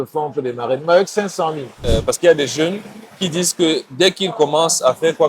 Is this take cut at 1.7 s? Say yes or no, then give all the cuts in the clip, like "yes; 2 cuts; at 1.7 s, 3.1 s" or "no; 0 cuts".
yes; 1 cut; at 1.7 s